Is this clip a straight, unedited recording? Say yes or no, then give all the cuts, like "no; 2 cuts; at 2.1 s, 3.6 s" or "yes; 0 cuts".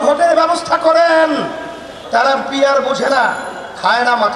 no; 1 cut; at 2.1 s